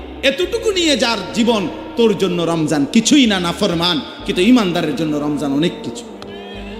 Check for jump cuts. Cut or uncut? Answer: cut